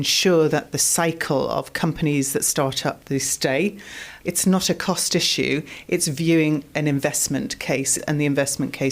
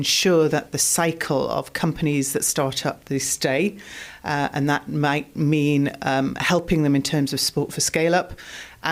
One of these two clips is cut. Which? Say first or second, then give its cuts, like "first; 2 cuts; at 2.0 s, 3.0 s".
first; 2 cuts; at 4.1 s, 8.0 s